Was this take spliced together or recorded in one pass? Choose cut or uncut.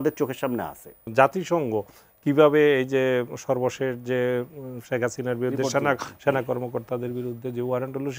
cut